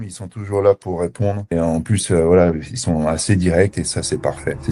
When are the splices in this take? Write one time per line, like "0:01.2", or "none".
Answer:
none